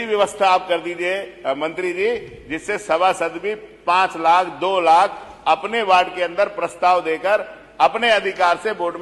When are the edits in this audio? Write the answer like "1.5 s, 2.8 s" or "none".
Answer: none